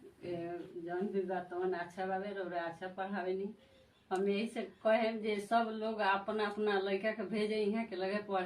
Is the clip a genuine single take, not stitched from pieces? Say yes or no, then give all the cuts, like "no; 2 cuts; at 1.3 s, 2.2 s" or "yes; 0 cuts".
yes; 0 cuts